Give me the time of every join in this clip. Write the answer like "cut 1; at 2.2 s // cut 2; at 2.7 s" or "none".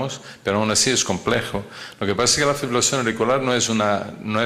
cut 1; at 2.7 s